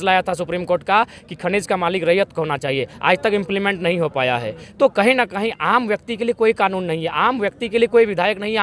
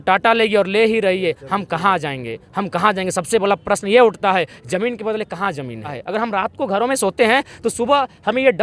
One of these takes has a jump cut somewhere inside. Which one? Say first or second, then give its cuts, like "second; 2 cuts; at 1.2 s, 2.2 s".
second; 1 cut; at 6.0 s